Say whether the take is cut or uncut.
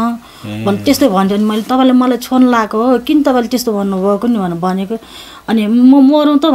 uncut